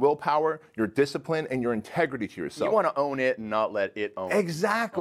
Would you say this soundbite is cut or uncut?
uncut